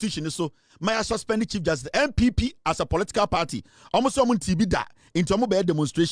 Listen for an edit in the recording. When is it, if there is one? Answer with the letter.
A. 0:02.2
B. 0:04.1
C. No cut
C